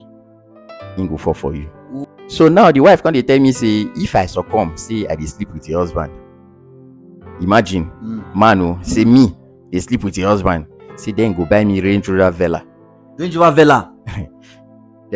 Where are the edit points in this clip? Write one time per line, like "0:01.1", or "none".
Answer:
0:02.0

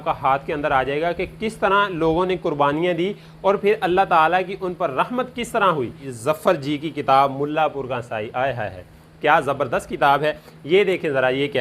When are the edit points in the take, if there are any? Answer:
0:06.0
0:10.5

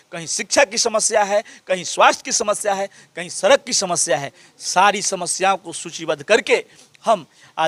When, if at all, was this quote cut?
none

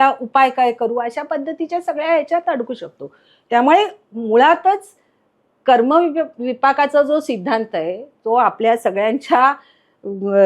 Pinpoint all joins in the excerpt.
none

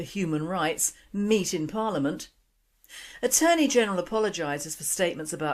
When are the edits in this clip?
0:02.2

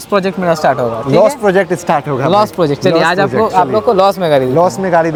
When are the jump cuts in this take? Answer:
none

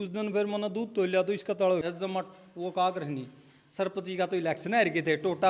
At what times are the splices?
0:01.8

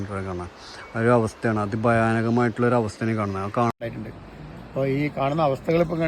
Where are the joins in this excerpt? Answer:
0:03.7

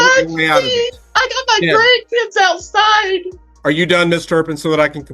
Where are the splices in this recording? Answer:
0:01.0
0:03.4

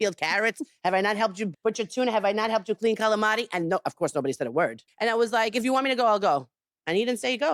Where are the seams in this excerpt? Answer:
0:04.8

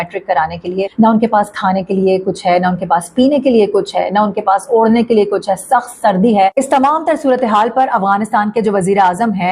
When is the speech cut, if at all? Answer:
0:00.9
0:06.5

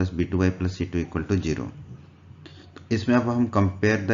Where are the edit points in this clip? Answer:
0:01.2

